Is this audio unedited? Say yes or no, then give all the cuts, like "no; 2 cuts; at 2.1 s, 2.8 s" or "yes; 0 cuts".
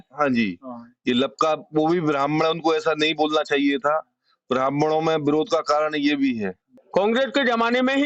no; 1 cut; at 6.8 s